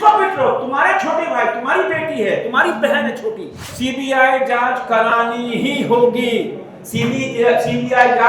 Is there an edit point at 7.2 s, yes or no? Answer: no